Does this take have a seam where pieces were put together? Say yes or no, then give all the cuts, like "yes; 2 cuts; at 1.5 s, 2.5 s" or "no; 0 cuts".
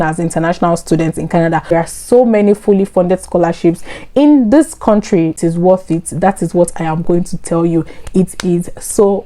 yes; 2 cuts; at 1.9 s, 5.3 s